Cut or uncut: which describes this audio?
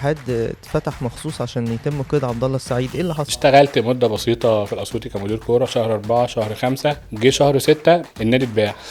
cut